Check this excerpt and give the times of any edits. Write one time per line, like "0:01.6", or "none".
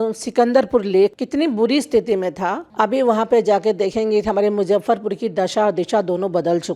0:01.2
0:02.6